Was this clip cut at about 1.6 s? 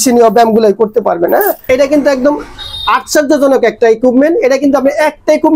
yes; 1 cut; at 1.6 s

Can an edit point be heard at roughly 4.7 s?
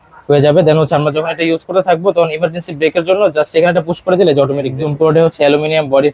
yes; 1 cut; at 4.7 s

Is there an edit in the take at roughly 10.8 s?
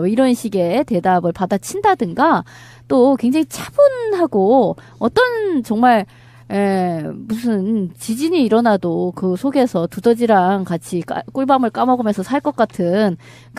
no; 1 cut; at 4.8 s

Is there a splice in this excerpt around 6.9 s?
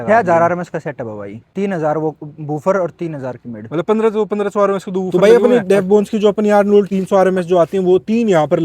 yes; 3 cuts; at 1.4 s, 5.1 s, 6.9 s

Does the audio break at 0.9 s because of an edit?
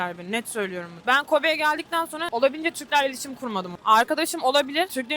no; 1 cut; at 2.2 s

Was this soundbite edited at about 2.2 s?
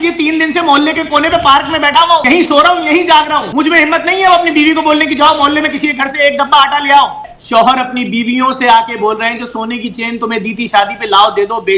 yes; 3 cuts; at 2.2 s, 3.5 s, 7.3 s

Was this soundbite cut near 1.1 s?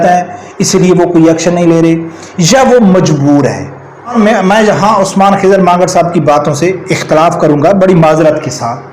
no; 1 cut; at 4.1 s

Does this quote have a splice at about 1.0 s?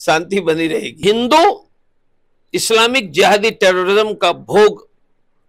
yes; 1 cut; at 1.0 s

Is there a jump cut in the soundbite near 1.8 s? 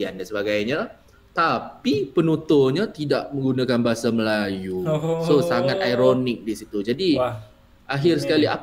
no; 0 cuts

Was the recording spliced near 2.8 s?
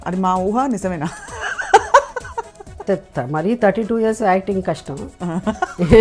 yes; 1 cut; at 2.8 s

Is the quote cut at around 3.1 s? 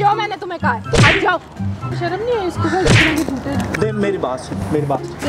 no; 1 cut; at 1.8 s

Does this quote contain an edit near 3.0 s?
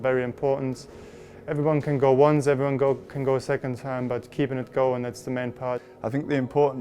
no; 1 cut; at 5.9 s

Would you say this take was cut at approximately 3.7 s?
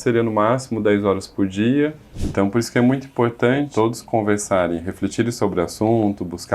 yes; 2 cuts; at 2.1 s, 3.7 s

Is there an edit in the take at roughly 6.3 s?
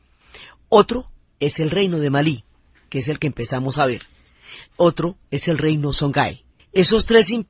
yes; 1 cut; at 6.3 s

